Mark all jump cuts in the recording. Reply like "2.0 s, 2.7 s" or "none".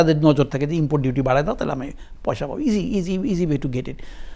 none